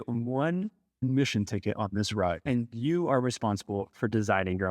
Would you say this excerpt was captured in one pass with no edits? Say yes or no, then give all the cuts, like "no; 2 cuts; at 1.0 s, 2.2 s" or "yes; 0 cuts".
no; 2 cuts; at 1.0 s, 2.4 s